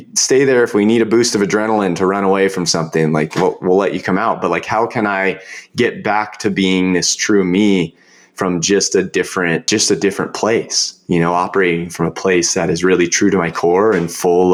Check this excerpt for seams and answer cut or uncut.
uncut